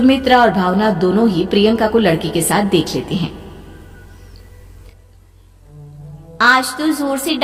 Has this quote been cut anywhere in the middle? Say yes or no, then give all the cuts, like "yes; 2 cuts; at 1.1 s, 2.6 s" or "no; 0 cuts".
no; 0 cuts